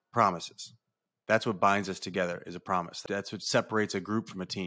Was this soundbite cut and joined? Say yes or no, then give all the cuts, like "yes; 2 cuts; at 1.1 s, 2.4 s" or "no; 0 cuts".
yes; 1 cut; at 3.0 s